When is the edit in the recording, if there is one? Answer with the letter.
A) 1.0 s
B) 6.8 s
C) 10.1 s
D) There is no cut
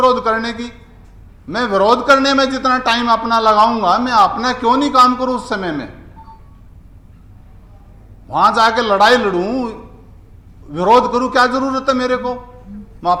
D